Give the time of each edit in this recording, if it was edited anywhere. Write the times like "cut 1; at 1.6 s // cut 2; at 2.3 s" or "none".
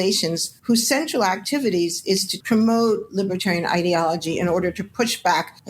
cut 1; at 2.3 s